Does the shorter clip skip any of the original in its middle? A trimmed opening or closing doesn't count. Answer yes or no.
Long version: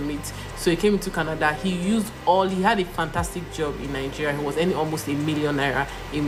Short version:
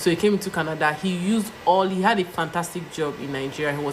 no